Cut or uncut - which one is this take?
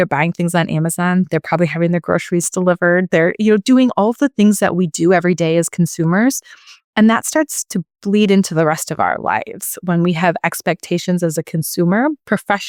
uncut